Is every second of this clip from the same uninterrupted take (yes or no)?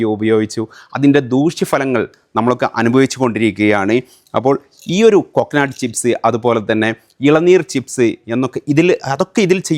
yes